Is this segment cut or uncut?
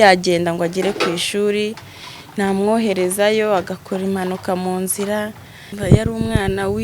cut